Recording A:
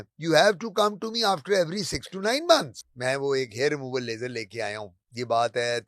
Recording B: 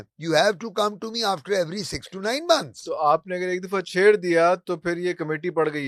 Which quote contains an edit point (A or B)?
A